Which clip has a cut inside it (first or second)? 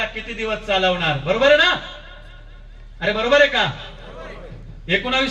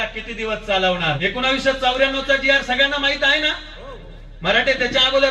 second